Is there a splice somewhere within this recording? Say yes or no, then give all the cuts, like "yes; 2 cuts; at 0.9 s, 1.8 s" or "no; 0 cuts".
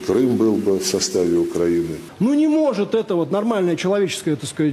yes; 1 cut; at 2.0 s